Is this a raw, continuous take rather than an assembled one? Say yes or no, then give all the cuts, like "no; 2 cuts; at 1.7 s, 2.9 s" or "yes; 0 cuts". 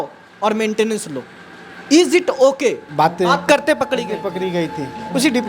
no; 1 cut; at 2.8 s